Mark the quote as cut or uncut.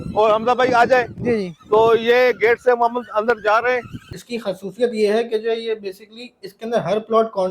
cut